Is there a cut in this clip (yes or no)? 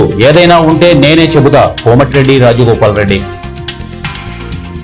no